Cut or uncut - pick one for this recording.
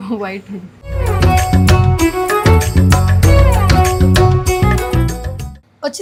uncut